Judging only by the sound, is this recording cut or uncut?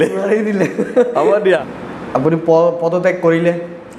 cut